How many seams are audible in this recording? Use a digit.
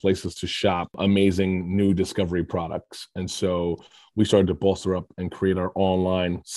1